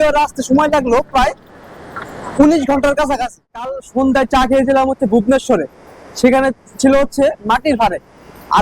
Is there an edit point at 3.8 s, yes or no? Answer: yes